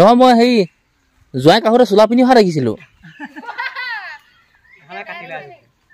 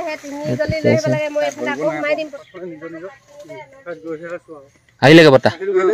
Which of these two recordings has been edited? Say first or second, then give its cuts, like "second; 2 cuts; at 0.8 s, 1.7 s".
second; 1 cut; at 2.3 s